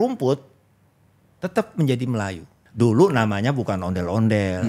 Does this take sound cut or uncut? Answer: cut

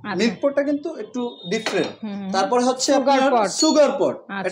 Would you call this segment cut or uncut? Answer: uncut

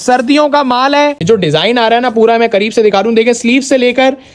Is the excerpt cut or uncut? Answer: cut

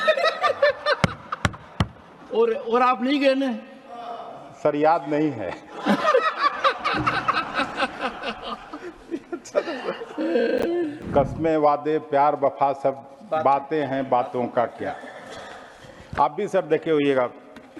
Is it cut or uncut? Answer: cut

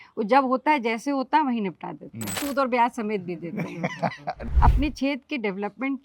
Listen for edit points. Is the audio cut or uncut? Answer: cut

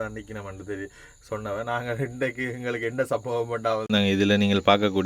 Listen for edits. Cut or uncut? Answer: cut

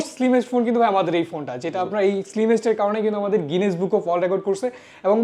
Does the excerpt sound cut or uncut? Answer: uncut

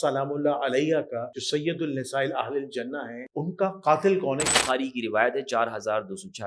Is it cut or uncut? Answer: cut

